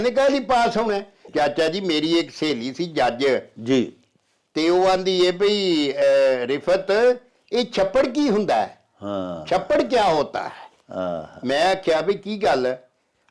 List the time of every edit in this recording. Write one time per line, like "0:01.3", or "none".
0:01.2